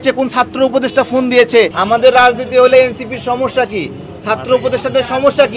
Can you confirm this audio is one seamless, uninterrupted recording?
no; 1 cut; at 1.8 s

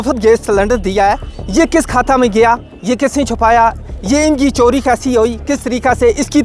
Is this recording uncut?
yes; 0 cuts

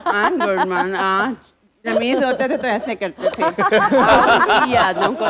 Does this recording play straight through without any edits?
yes; 0 cuts

